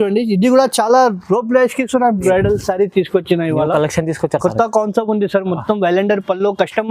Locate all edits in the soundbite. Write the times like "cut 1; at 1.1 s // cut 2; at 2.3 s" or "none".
cut 1; at 2.2 s